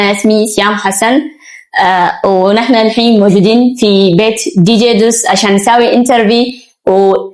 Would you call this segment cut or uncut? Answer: uncut